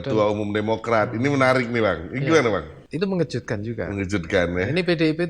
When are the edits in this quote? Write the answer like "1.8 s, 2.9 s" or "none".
2.8 s